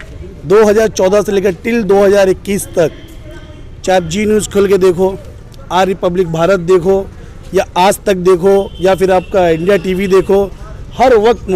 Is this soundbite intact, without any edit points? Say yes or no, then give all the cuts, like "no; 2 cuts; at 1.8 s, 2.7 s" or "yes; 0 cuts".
yes; 0 cuts